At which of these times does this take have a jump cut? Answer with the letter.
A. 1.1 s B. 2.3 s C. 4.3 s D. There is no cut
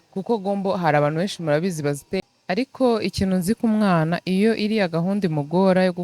B